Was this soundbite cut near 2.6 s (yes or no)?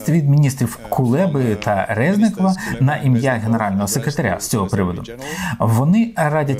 no